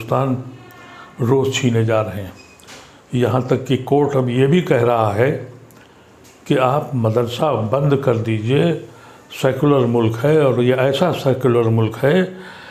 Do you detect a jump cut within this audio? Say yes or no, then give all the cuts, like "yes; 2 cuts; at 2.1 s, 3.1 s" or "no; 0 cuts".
no; 0 cuts